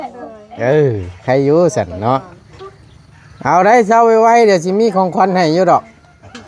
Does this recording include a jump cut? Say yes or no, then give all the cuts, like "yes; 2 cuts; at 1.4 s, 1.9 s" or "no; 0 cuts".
no; 0 cuts